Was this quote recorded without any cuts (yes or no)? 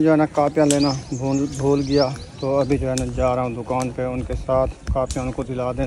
yes